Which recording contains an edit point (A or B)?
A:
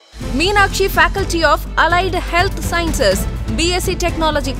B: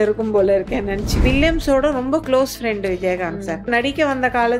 B